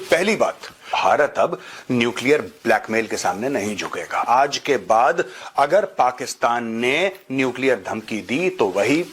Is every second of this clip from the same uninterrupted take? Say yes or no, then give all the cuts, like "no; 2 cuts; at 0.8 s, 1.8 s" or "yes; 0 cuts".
no; 2 cuts; at 0.9 s, 4.2 s